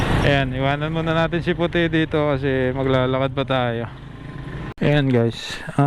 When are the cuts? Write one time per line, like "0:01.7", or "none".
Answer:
0:04.7